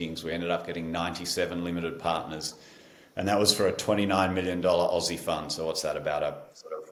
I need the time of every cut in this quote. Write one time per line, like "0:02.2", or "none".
none